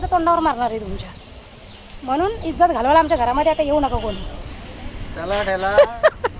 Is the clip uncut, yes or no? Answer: yes